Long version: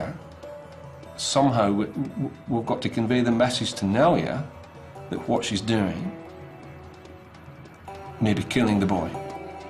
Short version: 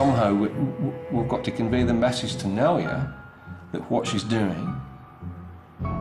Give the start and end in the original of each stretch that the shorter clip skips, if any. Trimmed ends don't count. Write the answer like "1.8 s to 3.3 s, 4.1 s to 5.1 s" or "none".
none